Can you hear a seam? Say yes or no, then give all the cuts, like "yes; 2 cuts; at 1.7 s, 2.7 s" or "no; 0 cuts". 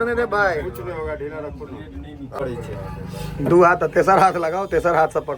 yes; 1 cut; at 2.2 s